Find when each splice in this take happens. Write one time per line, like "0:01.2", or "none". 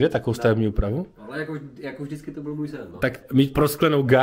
0:03.2